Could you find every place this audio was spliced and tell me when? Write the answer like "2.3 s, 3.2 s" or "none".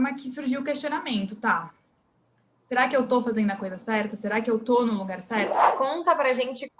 5.6 s

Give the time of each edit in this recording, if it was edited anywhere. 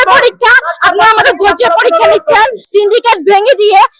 2.6 s

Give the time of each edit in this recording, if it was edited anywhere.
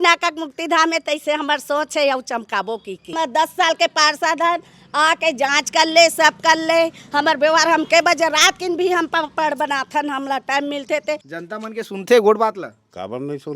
3.1 s, 11.3 s

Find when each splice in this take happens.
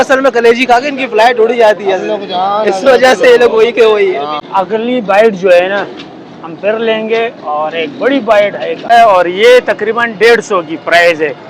4.4 s, 8.9 s

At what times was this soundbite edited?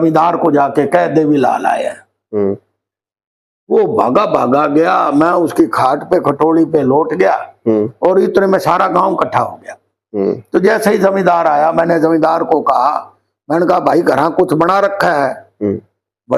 none

